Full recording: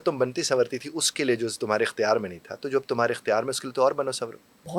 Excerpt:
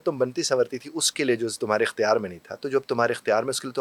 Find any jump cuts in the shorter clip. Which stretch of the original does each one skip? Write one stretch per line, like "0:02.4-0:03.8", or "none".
none